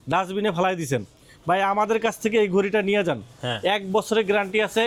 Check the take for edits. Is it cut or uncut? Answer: uncut